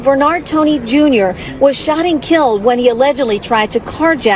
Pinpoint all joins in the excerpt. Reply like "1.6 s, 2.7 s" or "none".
1.6 s